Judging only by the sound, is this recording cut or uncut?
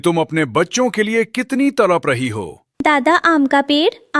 cut